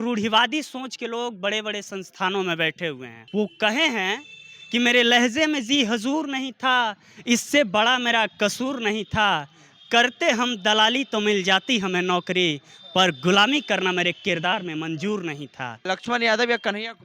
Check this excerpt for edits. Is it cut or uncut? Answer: cut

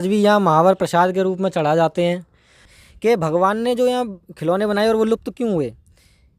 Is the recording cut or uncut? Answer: cut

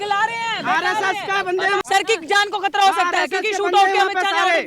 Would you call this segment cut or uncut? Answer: cut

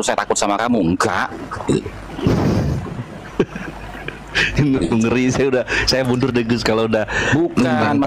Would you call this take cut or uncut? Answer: uncut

